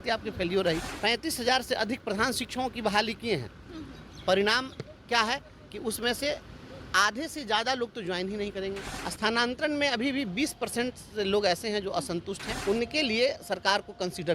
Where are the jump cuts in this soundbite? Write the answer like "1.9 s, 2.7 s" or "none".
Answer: 0.9 s, 8.8 s, 12.5 s